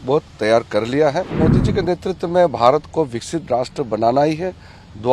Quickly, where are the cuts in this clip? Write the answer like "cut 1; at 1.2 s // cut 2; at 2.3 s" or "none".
cut 1; at 1.3 s